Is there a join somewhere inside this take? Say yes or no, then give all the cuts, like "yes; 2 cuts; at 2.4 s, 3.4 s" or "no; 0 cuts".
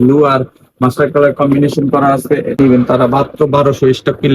yes; 1 cut; at 2.6 s